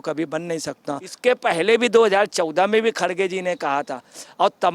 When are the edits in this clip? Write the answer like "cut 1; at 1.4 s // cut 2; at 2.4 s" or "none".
cut 1; at 1.1 s